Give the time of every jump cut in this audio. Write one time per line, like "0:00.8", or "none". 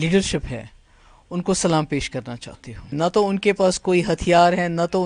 0:02.9